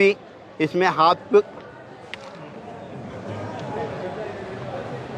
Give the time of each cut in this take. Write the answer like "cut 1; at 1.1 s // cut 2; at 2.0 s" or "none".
none